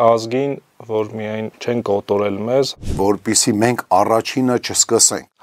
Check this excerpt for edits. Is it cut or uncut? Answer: cut